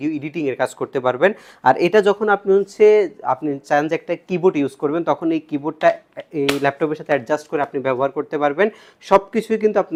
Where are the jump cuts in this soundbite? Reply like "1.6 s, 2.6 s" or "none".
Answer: none